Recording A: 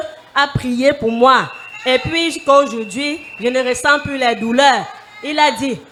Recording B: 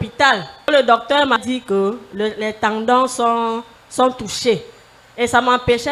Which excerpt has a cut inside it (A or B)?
B